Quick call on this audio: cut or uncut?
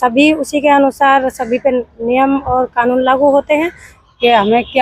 cut